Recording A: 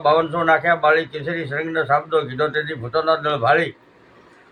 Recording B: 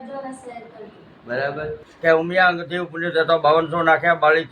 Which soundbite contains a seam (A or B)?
B